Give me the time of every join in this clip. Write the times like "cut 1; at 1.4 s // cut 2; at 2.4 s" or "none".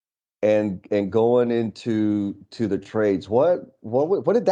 none

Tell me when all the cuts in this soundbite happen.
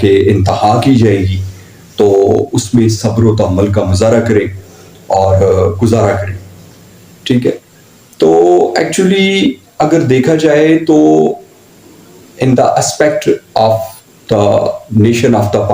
none

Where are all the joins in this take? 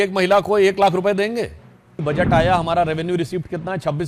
cut 1; at 2.0 s

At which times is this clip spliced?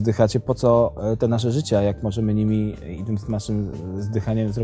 none

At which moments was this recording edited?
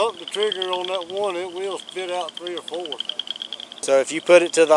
cut 1; at 3.8 s

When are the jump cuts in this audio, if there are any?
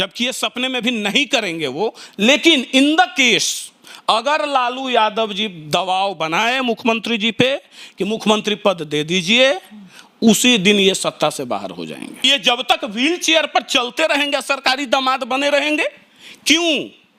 cut 1; at 12.2 s

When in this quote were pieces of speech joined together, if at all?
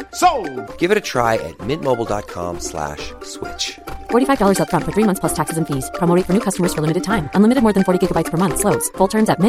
none

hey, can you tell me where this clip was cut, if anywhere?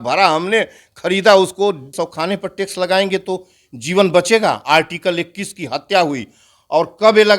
cut 1; at 1.9 s

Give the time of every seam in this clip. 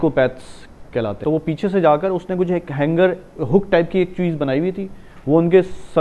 cut 1; at 1.2 s

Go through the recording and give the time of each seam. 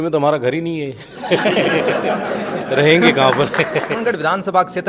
cut 1; at 3.9 s

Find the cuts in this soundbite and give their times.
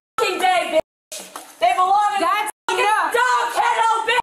none

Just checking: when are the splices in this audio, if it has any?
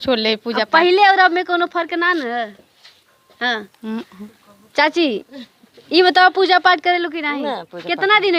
none

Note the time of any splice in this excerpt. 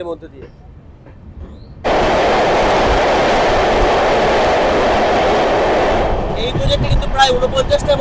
cut 1; at 1.8 s

